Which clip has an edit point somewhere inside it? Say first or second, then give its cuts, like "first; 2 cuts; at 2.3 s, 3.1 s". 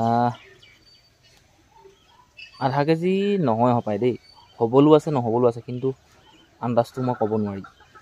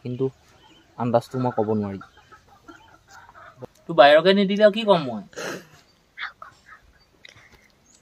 second; 1 cut; at 3.5 s